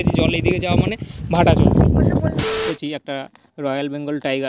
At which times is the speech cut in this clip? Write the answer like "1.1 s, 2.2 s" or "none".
2.4 s

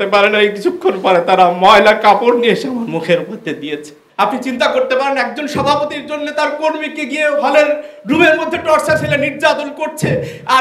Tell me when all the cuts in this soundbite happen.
4.0 s

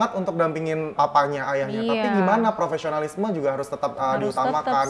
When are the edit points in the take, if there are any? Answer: 0.9 s

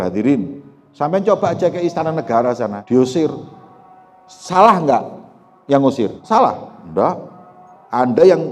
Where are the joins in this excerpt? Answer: 2.8 s, 6.2 s

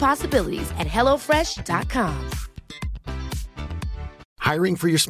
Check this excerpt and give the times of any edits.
4.2 s

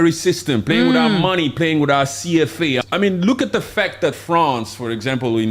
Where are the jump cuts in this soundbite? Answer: 2.8 s

